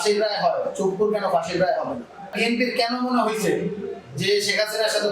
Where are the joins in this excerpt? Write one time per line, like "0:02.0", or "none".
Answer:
0:02.3